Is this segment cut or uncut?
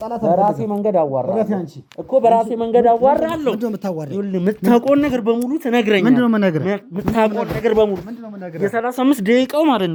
uncut